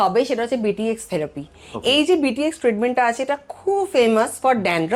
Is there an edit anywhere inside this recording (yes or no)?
no